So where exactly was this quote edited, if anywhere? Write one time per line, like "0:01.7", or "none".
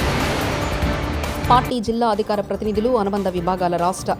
none